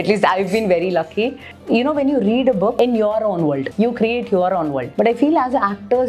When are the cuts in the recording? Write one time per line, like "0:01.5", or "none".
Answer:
0:01.5
0:02.7
0:03.7
0:04.8